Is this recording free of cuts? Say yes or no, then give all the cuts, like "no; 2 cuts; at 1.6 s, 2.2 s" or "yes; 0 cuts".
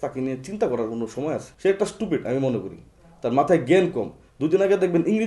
no; 1 cut; at 1.5 s